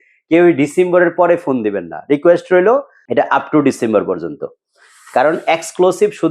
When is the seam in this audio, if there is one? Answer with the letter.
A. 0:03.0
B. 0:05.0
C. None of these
A